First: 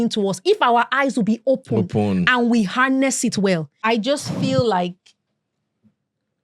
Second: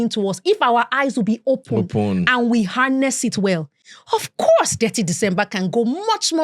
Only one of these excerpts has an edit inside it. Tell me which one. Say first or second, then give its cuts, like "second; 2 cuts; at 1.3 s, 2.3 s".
first; 1 cut; at 3.7 s